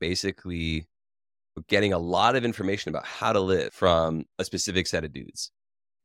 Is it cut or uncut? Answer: uncut